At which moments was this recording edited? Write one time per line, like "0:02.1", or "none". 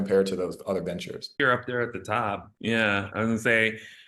0:01.3